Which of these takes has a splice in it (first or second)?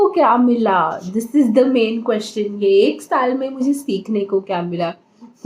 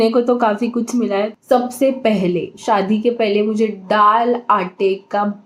second